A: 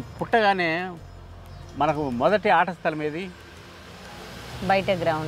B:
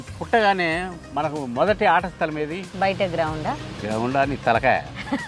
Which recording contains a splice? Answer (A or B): B